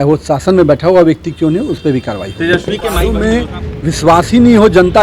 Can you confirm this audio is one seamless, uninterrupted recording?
no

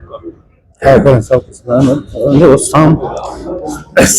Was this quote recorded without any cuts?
yes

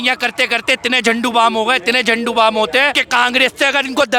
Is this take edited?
yes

